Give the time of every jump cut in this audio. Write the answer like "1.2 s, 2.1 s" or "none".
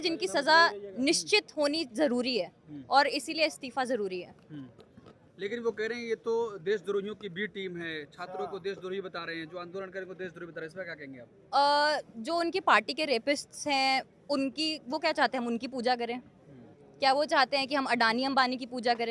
none